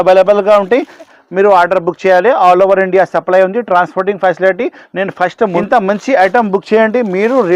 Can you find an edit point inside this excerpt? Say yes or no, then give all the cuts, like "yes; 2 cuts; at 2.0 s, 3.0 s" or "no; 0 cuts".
yes; 2 cuts; at 1.2 s, 5.6 s